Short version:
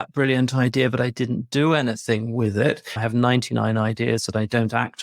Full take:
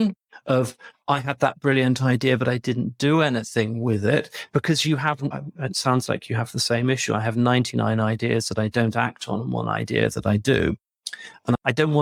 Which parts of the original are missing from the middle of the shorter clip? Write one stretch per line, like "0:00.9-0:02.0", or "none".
0:04.5-0:07.2